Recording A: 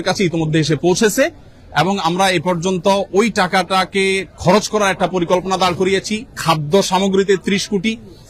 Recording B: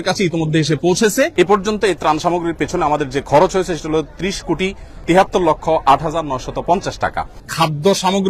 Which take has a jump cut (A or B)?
B